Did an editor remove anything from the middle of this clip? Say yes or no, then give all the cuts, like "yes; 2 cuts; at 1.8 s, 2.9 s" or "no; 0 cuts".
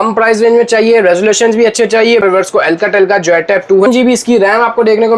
yes; 2 cuts; at 2.2 s, 3.9 s